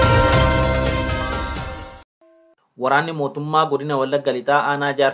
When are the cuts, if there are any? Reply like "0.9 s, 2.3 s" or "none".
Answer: 1.0 s, 2.7 s